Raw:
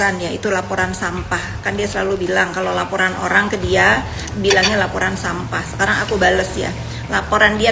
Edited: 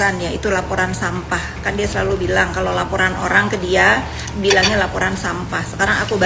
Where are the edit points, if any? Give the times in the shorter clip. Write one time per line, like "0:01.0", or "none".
none